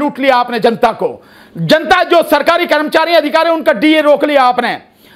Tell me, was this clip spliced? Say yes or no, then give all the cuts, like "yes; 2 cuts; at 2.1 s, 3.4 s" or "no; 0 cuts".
no; 0 cuts